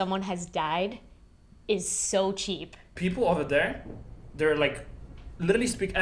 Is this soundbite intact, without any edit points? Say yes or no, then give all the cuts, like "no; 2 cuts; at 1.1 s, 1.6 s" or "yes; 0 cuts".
no; 1 cut; at 2.9 s